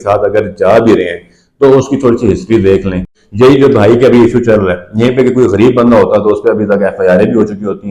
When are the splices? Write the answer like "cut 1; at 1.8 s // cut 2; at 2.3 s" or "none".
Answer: cut 1; at 3.2 s

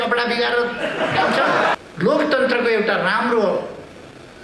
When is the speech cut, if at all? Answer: cut 1; at 1.7 s

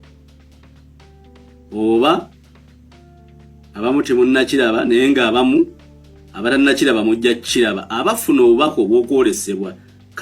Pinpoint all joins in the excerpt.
cut 1; at 2.3 s // cut 2; at 3.7 s

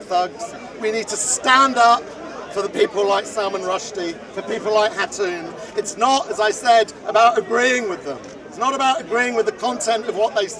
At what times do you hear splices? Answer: none

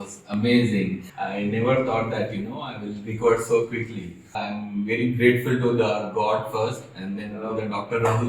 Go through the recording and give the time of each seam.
cut 1; at 1.0 s // cut 2; at 4.3 s

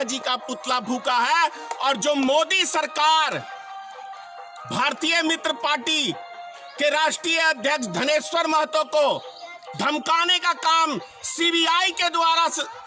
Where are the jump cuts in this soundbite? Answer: none

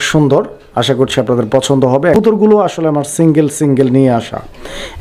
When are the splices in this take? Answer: cut 1; at 2.2 s

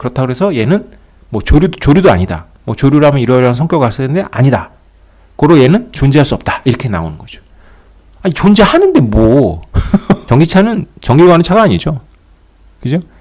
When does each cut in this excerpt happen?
cut 1; at 10.2 s

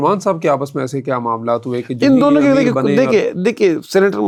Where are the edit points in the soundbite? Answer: none

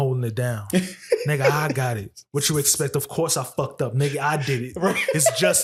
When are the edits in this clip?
none

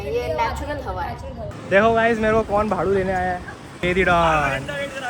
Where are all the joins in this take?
cut 1; at 1.6 s // cut 2; at 3.7 s

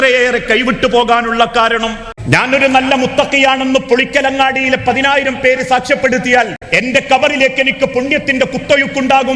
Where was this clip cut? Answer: cut 1; at 2.1 s // cut 2; at 6.6 s

